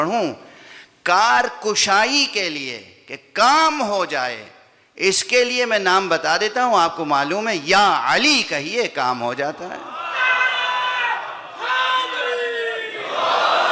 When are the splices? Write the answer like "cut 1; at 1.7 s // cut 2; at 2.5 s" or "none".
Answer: none